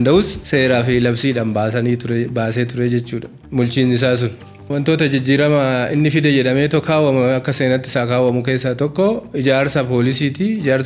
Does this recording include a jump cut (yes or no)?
yes